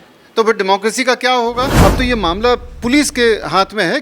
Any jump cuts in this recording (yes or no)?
yes